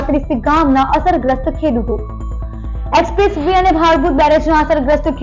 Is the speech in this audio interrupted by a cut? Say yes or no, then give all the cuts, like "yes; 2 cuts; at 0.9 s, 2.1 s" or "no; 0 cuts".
no; 0 cuts